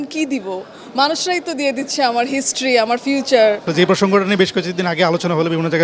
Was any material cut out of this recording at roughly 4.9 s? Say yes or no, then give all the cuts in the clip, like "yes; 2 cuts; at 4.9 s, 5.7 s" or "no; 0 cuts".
no; 1 cut; at 3.7 s